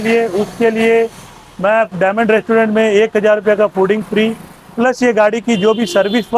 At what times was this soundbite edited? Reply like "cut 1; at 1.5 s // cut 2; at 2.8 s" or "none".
none